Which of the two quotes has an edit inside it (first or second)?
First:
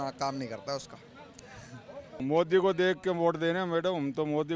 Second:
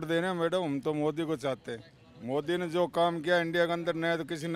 first